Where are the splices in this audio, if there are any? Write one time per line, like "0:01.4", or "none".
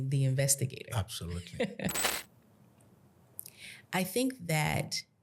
0:02.1